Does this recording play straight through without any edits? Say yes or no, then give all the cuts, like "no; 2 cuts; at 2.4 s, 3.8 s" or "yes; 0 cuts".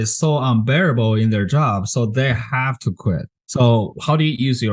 no; 1 cut; at 3.4 s